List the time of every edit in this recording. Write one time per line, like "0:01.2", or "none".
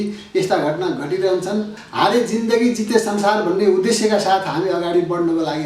0:01.8